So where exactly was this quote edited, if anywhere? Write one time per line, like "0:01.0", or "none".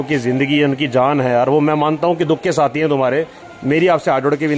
0:03.4